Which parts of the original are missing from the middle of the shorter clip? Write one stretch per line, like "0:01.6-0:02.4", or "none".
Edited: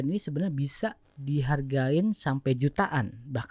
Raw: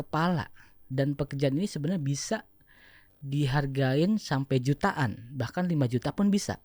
0:02.6-0:03.1

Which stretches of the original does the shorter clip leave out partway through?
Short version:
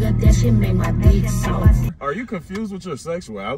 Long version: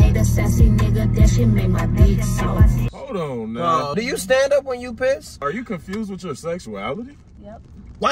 0:02.9-0:05.3

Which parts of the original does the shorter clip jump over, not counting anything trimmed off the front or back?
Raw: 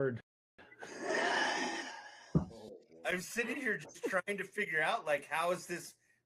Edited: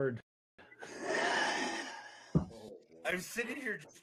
none

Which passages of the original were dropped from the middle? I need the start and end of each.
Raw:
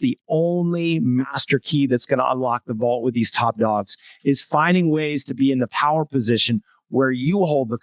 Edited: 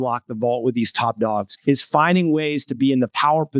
0:03.9-0:04.1

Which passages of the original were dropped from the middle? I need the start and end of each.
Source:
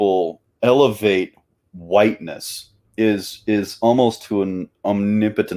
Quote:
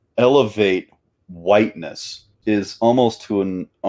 0:02.8-0:03.3

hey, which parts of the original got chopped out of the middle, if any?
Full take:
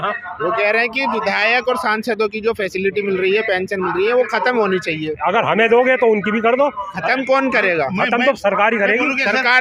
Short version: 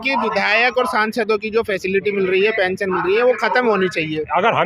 none

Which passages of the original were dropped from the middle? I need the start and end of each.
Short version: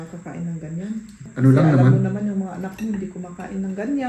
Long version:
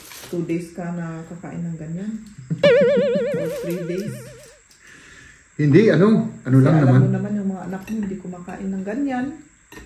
0:02.4-0:06.4

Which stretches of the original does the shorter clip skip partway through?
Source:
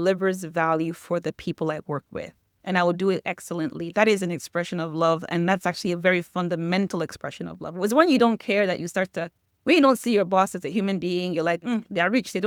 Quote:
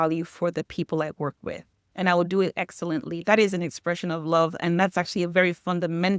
none

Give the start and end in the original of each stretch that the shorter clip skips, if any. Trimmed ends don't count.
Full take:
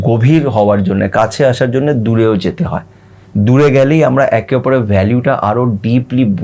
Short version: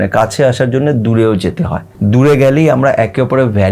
0:02.8-0:03.2

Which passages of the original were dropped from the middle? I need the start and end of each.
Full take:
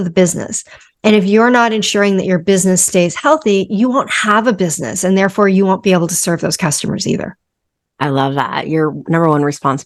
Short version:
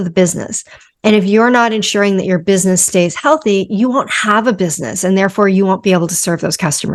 none

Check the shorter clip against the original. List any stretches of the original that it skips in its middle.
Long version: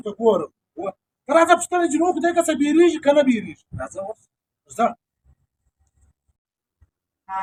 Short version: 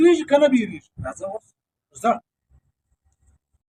none

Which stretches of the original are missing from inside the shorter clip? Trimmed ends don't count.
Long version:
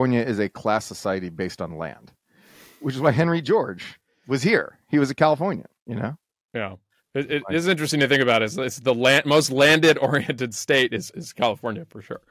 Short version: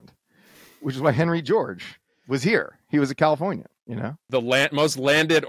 0:06.2-0:08.7

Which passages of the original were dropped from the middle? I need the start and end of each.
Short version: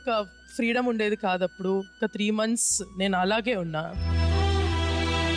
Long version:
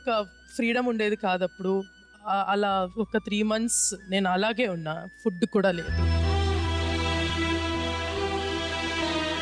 0:02.0-0:03.1
0:05.1-0:05.9

